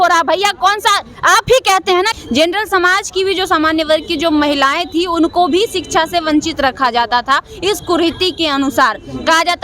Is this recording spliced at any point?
yes; 1 cut; at 2.2 s

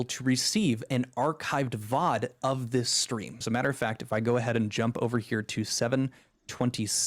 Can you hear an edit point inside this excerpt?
yes; 1 cut; at 3.3 s

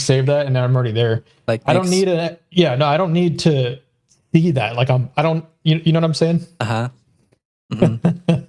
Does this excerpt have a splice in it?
no; 0 cuts

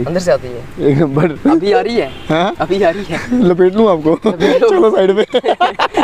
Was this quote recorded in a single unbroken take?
yes; 0 cuts

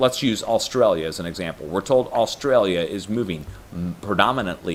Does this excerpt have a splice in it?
no; 0 cuts

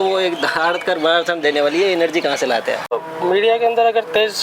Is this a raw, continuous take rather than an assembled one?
no; 1 cut; at 3.0 s

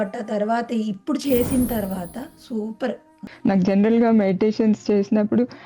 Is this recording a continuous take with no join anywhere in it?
no; 1 cut; at 3.2 s

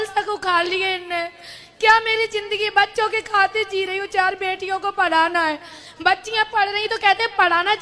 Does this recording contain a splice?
no; 0 cuts

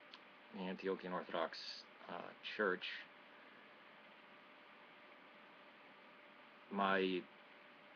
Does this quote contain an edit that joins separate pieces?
no; 0 cuts

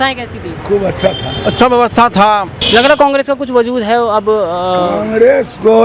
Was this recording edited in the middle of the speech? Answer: yes; 1 cut; at 2.6 s

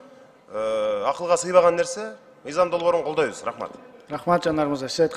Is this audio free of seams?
yes; 0 cuts

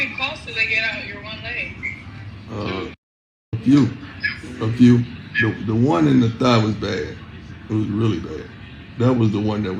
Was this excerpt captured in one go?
yes; 0 cuts

